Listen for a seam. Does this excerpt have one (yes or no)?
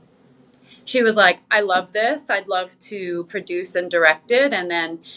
no